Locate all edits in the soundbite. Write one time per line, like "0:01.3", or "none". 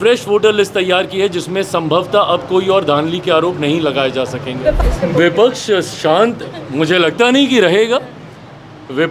0:04.8